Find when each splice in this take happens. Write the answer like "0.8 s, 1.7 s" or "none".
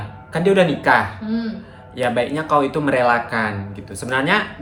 none